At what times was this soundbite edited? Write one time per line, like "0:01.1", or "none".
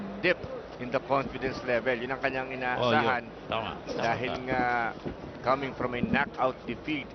0:01.3